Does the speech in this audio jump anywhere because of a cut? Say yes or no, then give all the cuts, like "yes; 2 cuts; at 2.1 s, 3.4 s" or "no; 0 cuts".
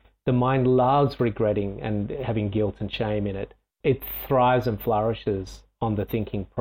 no; 0 cuts